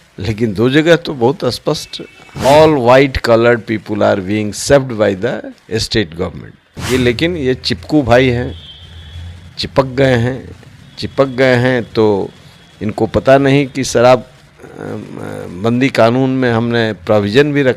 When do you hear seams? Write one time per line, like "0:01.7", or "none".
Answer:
0:02.4
0:06.8

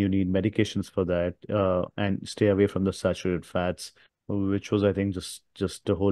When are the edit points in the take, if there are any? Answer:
none

